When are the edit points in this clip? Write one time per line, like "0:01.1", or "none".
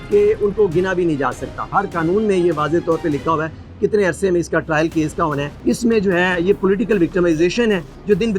0:01.8
0:05.6